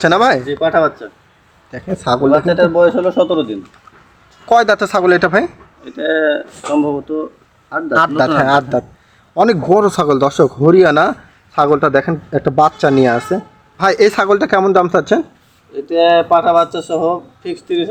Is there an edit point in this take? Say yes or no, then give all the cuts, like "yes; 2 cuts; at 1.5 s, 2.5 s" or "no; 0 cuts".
no; 0 cuts